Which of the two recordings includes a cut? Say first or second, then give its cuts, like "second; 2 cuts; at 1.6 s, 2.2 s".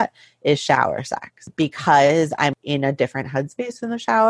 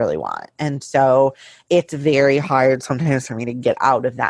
first; 2 cuts; at 1.4 s, 2.5 s